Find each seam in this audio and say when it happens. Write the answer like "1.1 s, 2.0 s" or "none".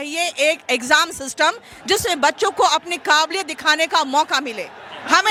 none

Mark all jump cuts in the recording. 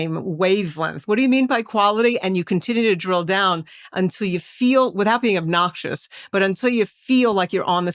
none

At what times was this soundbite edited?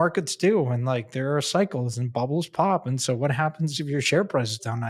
none

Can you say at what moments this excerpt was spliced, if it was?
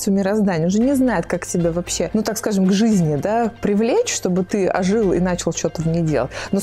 2.1 s

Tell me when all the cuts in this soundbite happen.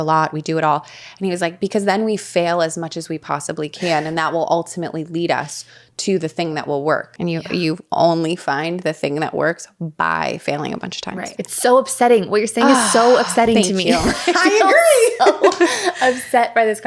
7.1 s, 11.3 s

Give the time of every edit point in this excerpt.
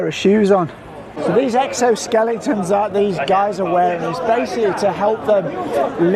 1.1 s

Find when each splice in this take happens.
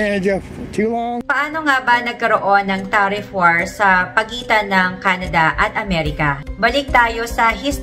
1.2 s

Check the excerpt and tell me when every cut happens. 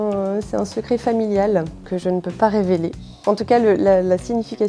1.9 s

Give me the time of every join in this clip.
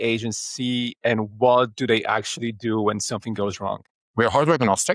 3.8 s

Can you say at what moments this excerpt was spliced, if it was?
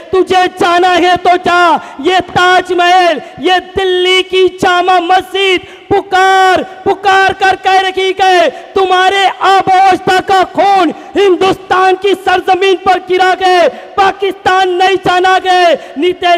none

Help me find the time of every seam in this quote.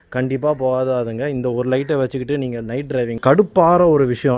3.2 s

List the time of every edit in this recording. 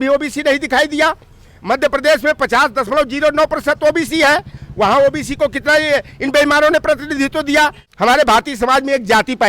7.8 s

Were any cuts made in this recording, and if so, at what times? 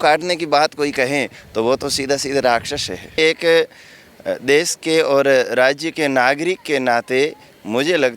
3.2 s

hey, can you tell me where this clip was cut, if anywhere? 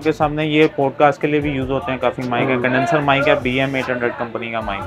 none

